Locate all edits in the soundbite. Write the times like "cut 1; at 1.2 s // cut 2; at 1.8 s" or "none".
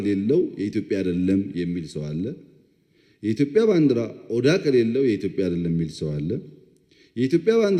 none